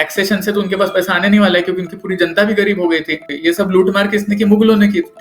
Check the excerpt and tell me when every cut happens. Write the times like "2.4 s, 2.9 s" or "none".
3.3 s